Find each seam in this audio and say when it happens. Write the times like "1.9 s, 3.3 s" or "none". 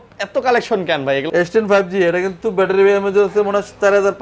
1.3 s